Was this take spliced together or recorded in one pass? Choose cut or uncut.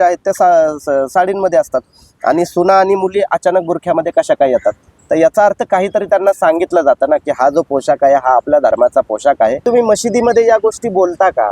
cut